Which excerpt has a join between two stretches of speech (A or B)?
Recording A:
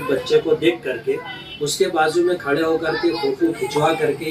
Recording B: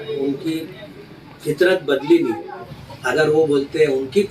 B